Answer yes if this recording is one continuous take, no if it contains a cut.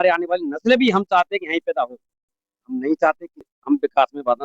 no